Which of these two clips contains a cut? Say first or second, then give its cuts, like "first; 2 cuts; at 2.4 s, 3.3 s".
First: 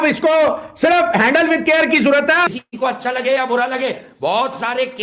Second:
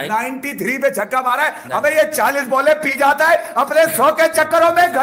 first; 1 cut; at 2.5 s